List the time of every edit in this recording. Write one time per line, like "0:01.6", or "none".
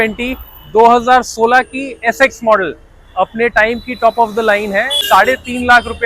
0:05.0

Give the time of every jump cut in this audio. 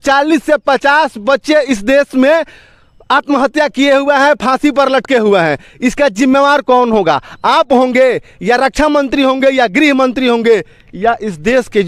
none

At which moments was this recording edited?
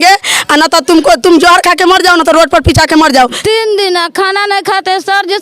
0:03.2

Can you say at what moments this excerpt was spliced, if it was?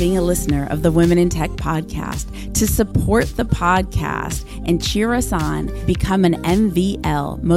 none

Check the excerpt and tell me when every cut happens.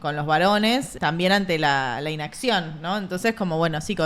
0:00.9

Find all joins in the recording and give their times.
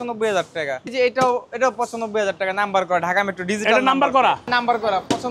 0:00.9
0:04.5

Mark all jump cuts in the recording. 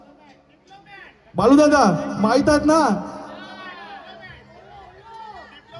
none

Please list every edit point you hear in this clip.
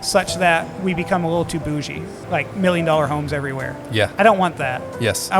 0:02.2

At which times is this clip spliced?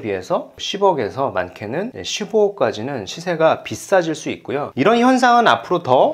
none

